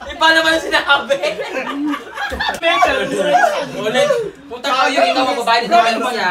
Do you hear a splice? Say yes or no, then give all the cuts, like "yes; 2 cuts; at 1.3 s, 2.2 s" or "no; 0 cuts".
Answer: yes; 1 cut; at 2.6 s